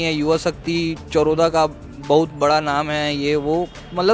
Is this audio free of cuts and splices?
yes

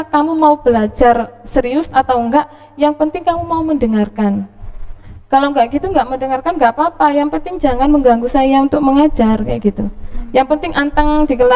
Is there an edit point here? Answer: no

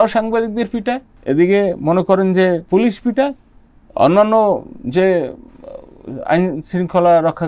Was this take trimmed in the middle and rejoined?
yes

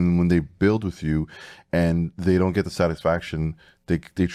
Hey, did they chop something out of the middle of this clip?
no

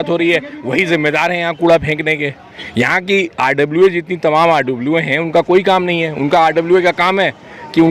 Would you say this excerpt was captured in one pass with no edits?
yes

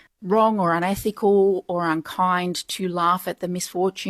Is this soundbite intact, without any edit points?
yes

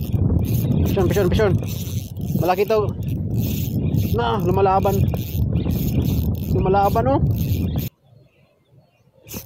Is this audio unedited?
no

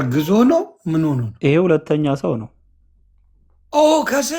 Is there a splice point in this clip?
yes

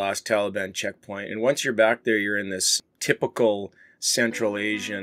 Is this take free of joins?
yes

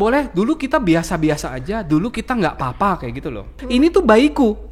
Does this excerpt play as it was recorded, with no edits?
no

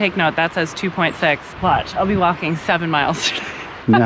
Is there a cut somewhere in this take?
yes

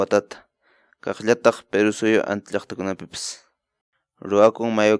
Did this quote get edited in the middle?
yes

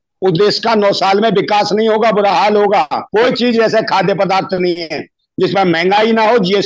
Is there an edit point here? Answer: yes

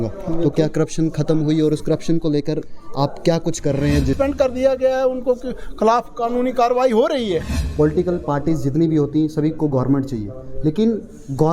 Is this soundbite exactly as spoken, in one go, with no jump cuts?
no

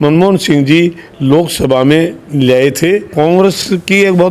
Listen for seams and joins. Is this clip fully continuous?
no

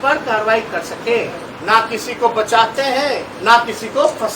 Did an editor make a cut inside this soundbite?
yes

